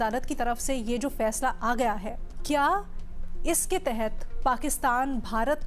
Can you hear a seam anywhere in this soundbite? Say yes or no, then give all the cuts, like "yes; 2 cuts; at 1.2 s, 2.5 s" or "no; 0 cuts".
no; 0 cuts